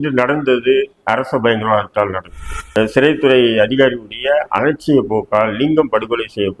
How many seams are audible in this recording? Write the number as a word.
one